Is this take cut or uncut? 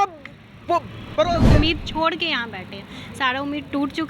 cut